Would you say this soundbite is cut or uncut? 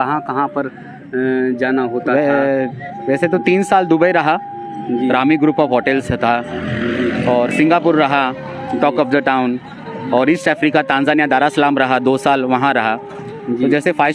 uncut